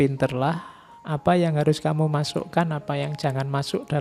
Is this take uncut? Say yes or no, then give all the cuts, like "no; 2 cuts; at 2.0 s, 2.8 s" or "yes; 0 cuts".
yes; 0 cuts